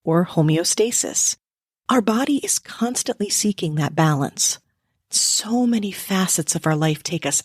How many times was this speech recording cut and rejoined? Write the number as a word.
one